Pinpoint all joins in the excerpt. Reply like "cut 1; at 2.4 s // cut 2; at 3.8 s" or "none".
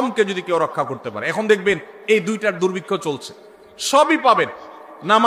none